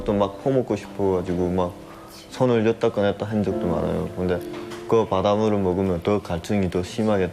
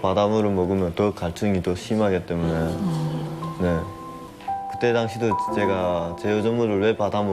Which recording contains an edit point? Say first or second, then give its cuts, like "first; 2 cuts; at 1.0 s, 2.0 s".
second; 1 cut; at 4.3 s